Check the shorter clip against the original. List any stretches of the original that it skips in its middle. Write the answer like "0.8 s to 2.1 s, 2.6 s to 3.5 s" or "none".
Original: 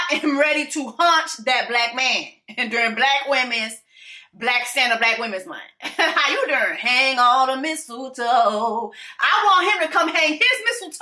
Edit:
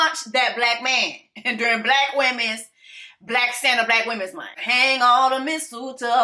5.7 s to 6.8 s